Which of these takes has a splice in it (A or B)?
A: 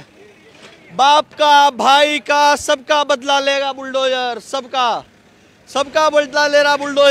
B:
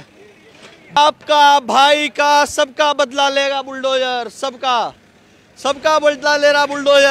B